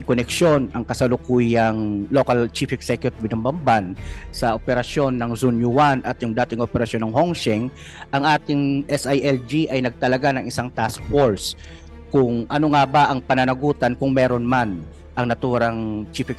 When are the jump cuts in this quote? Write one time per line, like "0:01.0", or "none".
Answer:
none